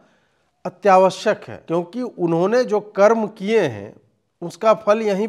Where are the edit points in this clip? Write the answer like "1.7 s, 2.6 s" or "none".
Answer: 1.5 s

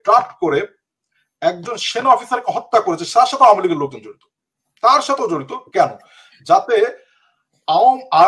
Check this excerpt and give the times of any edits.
none

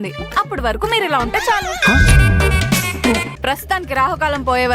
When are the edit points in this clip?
3.3 s

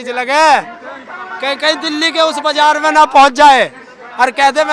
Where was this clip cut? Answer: none

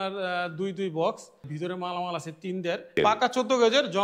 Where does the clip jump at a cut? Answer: 1.4 s, 3.0 s

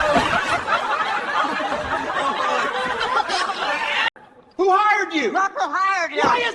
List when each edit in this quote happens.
4.2 s

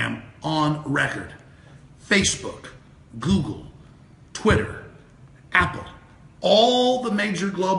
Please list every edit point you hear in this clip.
4.3 s

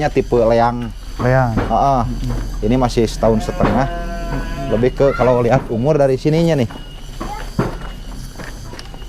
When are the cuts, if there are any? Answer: none

